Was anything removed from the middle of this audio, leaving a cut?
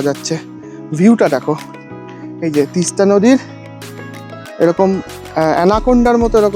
no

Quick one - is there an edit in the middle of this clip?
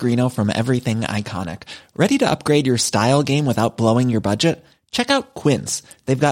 no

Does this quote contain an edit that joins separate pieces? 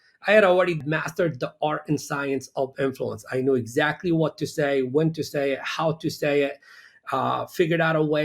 yes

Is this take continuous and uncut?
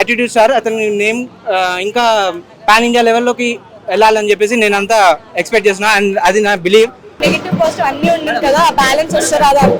no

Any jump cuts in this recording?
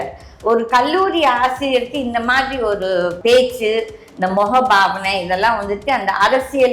yes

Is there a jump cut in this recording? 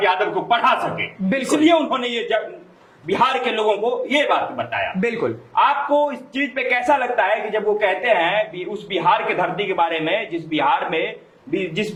no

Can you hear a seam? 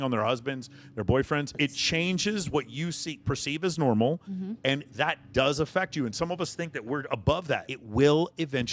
yes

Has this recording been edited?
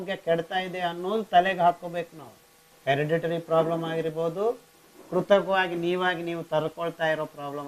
yes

